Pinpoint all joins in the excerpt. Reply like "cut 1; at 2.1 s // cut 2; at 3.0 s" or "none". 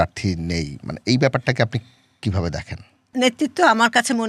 cut 1; at 3.1 s